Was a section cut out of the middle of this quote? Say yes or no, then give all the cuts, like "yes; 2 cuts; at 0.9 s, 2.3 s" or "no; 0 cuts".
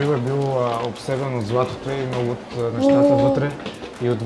no; 0 cuts